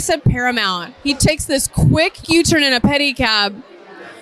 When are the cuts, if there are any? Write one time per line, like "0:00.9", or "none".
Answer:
0:02.2